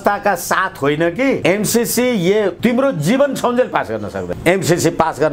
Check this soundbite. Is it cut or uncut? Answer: cut